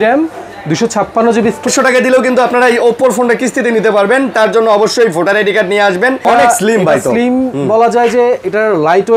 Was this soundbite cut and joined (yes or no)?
yes